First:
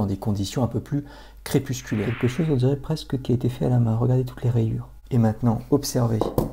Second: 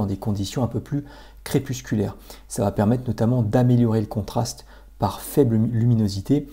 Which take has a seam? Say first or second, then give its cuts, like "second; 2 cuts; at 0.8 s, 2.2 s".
first; 2 cuts; at 2.1 s, 4.9 s